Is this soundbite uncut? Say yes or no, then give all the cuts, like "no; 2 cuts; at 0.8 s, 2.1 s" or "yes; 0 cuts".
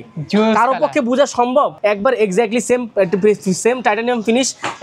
no; 1 cut; at 1.7 s